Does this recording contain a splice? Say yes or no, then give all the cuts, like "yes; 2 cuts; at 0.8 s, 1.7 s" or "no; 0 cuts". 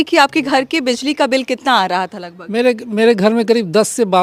no; 0 cuts